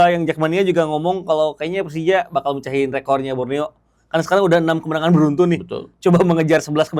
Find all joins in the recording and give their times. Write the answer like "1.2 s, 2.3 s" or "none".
none